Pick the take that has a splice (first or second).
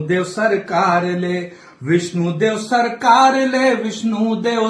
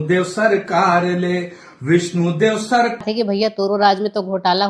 second